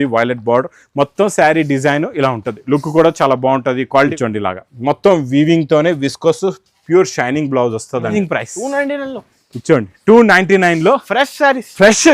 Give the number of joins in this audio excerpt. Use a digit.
2